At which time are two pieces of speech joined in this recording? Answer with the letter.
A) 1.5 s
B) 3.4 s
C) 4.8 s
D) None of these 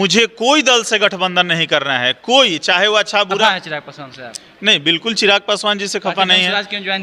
B